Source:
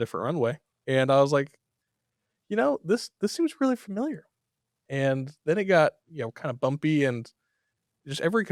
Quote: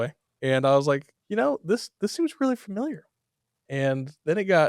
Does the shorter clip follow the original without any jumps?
no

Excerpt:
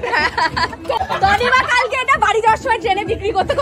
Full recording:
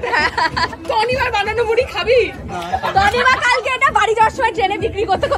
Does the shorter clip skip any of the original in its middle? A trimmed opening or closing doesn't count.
yes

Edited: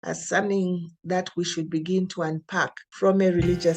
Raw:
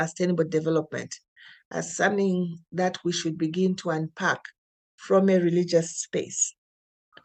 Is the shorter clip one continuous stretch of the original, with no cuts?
no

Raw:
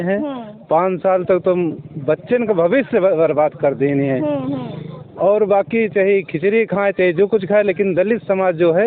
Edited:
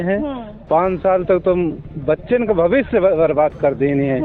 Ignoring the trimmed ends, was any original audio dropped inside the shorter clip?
no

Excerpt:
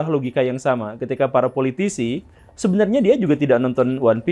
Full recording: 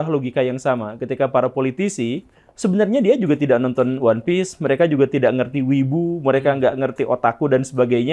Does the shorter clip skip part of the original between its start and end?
no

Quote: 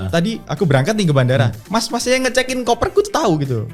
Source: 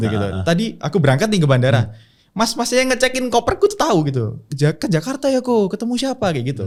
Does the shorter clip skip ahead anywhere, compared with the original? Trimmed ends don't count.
yes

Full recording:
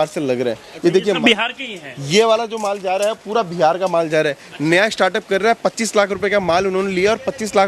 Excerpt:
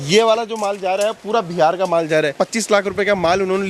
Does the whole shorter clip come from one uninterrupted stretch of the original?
no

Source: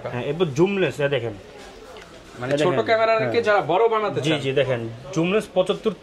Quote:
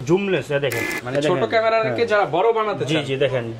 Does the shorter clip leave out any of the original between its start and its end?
yes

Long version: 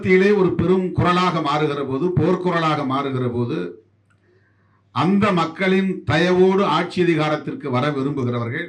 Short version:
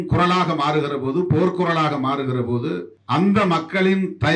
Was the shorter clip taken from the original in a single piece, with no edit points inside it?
no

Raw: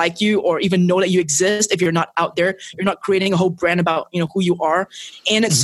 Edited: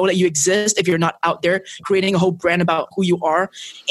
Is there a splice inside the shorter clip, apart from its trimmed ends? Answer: yes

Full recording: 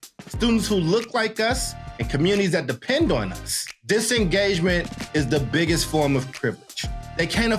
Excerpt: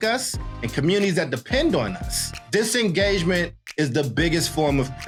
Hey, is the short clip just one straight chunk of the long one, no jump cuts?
yes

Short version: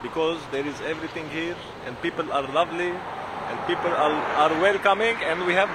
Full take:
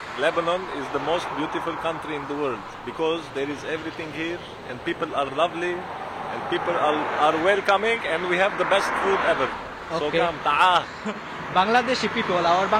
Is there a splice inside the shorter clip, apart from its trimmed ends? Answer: no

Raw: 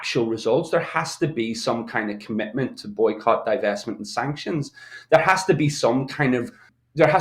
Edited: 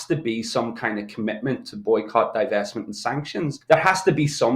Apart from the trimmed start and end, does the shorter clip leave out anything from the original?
yes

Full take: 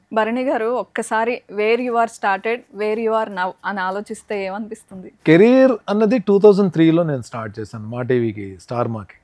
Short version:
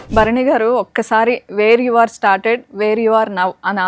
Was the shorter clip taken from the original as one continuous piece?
yes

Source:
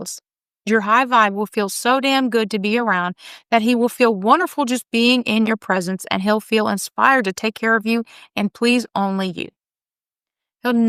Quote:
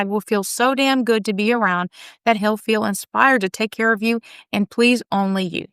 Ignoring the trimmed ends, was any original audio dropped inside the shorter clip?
yes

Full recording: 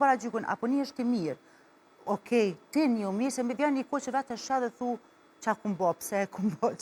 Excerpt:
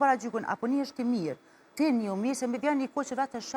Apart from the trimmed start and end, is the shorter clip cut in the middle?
yes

